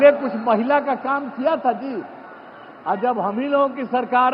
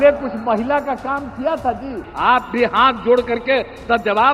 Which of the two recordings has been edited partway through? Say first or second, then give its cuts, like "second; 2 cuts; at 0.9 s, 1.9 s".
second; 1 cut; at 2.0 s